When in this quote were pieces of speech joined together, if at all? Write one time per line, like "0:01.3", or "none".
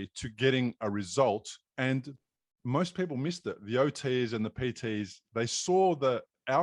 0:01.6

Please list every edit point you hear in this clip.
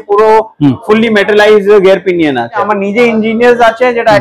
0:02.7

